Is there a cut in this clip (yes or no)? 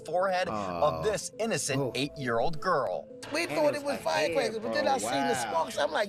no